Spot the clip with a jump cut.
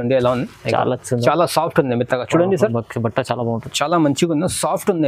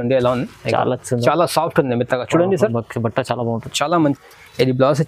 second; 1 cut; at 4.2 s

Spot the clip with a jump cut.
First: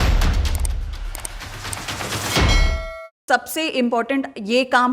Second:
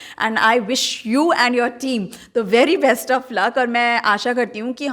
first; 1 cut; at 3.2 s

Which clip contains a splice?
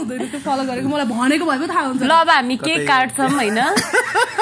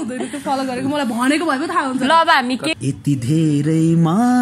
second; 1 cut; at 2.7 s

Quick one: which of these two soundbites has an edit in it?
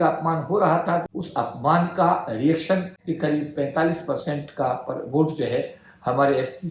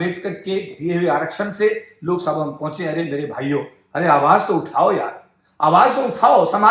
first; 2 cuts; at 1.1 s, 3.0 s

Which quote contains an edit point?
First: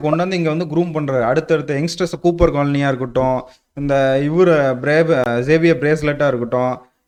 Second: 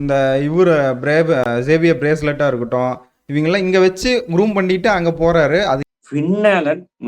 second; 1 cut; at 5.8 s

